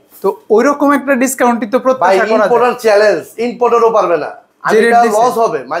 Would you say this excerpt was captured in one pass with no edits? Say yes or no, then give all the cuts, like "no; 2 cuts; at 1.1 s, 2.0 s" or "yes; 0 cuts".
yes; 0 cuts